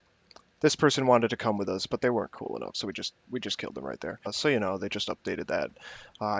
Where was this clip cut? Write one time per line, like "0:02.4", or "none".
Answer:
none

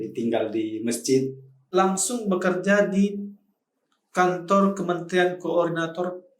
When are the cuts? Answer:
0:01.6

